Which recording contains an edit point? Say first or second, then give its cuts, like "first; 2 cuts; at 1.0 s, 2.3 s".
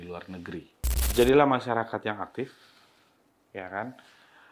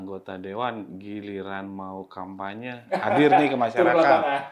first; 1 cut; at 1.0 s